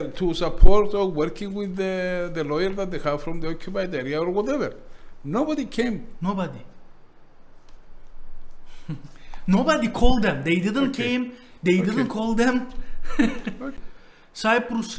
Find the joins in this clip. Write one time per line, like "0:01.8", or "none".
0:13.8